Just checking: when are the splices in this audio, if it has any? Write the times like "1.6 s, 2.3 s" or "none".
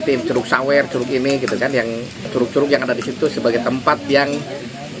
2.3 s